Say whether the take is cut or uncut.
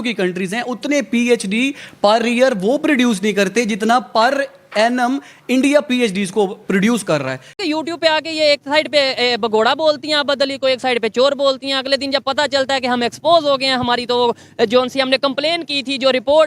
cut